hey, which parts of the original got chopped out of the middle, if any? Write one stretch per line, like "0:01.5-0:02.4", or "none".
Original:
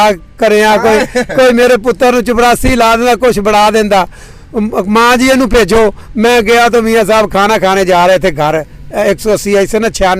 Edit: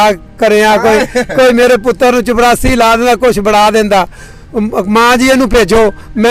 none